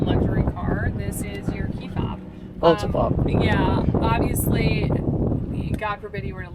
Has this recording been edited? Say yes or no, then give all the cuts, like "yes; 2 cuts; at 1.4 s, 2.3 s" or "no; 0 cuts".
no; 0 cuts